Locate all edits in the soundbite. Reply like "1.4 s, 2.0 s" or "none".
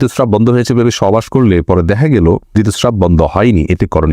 2.5 s